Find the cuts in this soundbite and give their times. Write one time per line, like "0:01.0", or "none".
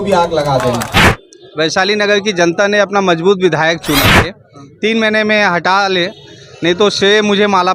0:01.1
0:04.3